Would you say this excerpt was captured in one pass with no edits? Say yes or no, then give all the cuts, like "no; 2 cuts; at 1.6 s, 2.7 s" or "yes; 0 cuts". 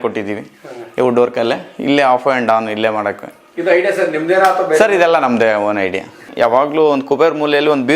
no; 1 cut; at 6.3 s